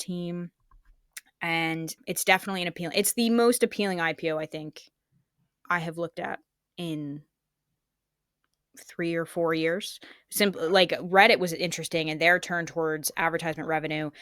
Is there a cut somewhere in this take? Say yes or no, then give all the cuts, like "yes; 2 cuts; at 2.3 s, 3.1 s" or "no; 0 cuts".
yes; 1 cut; at 2.0 s